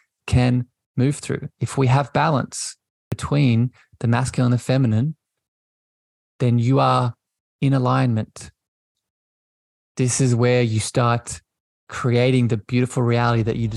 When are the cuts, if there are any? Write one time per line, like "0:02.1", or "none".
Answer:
0:03.1